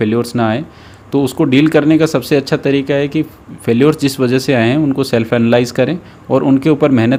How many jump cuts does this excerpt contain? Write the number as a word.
zero